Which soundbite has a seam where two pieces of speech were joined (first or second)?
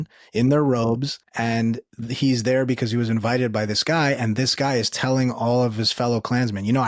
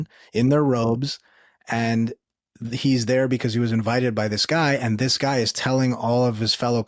first